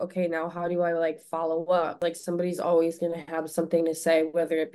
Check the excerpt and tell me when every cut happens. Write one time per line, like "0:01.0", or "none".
0:02.0